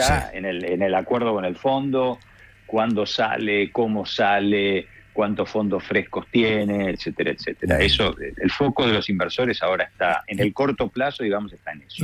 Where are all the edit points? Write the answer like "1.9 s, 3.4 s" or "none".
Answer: none